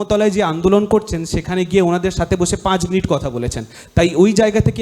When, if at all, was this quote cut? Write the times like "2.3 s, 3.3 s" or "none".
none